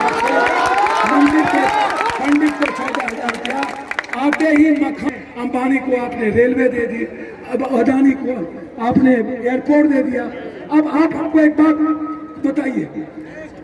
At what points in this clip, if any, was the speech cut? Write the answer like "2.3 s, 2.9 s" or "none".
5.0 s